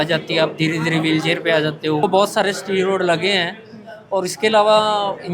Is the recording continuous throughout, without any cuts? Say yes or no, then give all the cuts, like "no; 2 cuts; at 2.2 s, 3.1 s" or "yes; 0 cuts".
no; 1 cut; at 2.0 s